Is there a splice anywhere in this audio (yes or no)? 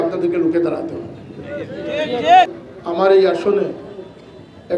yes